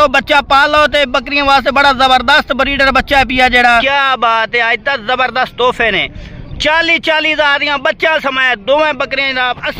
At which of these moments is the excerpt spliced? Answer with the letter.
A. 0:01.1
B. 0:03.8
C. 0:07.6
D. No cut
B